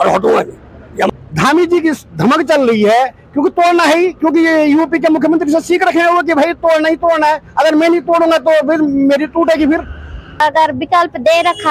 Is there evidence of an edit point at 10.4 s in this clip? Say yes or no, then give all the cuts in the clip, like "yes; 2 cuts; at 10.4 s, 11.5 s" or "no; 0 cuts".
yes; 2 cuts; at 1.1 s, 10.4 s